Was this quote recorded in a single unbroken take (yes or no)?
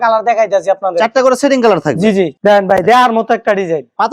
no